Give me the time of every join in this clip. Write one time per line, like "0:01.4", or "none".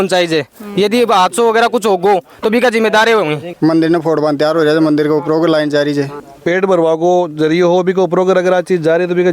0:03.5
0:06.2